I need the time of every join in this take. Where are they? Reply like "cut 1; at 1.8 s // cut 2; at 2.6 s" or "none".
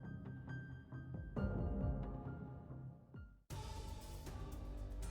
cut 1; at 3.3 s